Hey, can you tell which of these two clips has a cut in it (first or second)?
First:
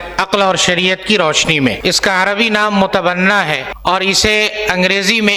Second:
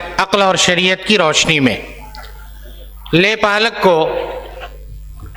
first